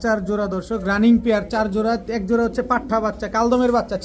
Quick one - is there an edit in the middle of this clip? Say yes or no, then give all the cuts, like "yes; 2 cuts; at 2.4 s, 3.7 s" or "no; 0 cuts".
no; 0 cuts